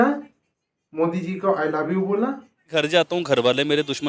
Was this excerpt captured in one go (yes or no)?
no